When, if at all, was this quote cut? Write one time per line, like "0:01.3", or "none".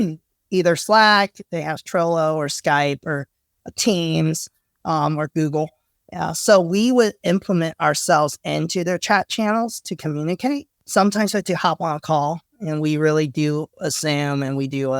0:10.7